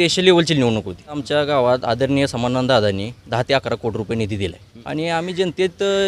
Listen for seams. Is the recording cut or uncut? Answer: cut